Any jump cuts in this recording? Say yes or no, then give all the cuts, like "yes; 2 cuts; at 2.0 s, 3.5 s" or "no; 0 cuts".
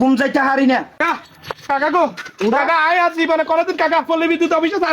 yes; 1 cut; at 1.0 s